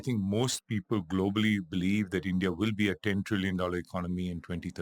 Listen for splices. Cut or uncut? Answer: uncut